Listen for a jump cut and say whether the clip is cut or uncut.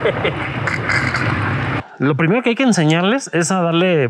cut